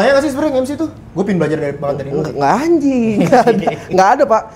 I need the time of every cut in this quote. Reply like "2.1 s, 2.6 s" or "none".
none